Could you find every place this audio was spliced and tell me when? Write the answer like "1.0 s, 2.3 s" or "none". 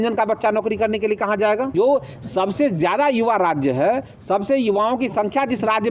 1.7 s